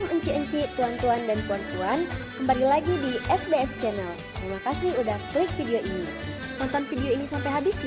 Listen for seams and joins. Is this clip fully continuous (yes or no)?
yes